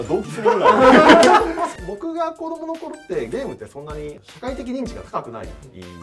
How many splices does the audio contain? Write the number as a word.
two